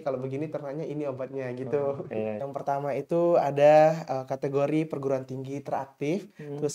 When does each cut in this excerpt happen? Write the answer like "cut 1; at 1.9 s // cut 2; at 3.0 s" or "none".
cut 1; at 2.4 s

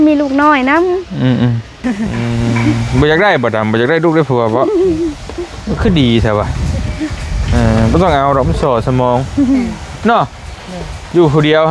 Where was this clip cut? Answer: cut 1; at 1.7 s

